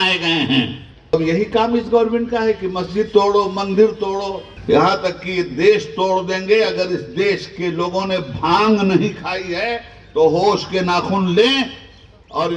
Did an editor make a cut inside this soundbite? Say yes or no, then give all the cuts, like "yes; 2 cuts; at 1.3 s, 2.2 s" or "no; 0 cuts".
yes; 2 cuts; at 1.1 s, 4.5 s